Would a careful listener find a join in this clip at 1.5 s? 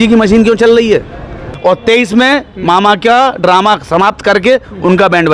yes; 1 cut; at 1.5 s

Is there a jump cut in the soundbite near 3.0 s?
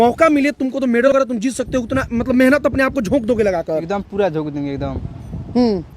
no; 1 cut; at 1.1 s

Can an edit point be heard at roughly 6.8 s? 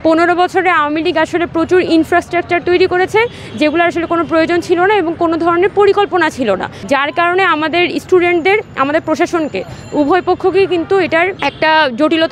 no; 0 cuts

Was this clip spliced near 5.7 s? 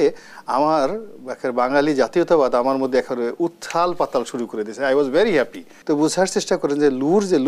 yes; 1 cut; at 5.7 s

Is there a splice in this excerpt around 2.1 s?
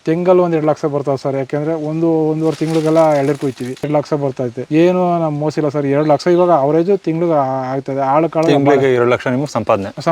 no; 1 cut; at 4.2 s

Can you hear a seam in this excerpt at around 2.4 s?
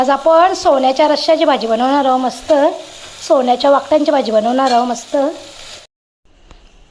no; 1 cut; at 5.8 s

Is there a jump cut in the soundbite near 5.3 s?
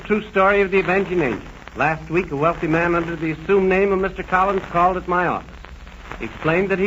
yes; 1 cut; at 5.3 s

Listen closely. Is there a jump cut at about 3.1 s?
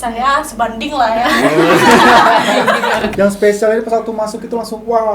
yes; 1 cut; at 3.1 s

